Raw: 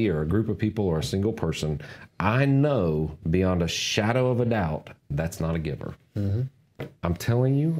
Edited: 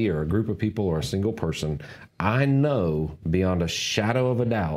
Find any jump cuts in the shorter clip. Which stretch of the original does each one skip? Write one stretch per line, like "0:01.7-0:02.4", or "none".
none